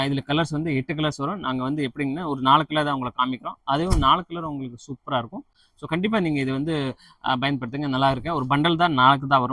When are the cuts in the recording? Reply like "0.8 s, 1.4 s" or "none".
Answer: none